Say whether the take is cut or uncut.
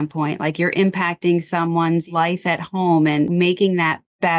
cut